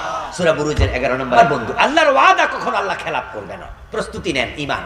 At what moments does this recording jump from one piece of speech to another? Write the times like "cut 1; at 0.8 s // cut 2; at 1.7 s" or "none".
cut 1; at 1.4 s